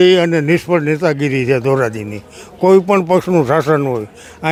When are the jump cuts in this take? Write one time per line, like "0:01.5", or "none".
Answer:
none